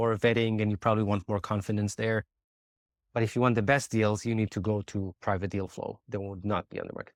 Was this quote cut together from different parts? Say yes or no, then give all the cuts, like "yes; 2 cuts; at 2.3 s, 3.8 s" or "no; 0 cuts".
no; 0 cuts